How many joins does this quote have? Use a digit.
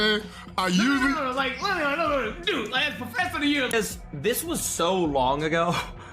1